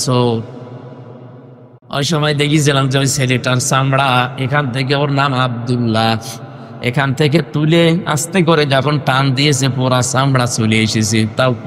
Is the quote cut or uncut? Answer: cut